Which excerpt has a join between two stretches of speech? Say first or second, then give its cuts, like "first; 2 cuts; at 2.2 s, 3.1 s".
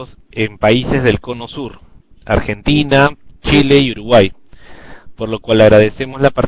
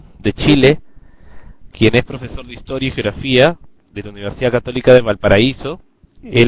second; 1 cut; at 5.2 s